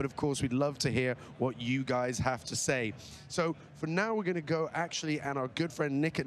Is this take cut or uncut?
uncut